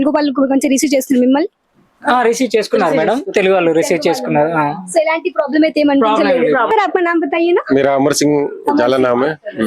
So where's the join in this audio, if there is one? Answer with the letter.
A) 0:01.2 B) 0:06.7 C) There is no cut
B